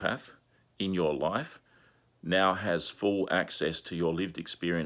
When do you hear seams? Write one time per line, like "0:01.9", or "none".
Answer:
none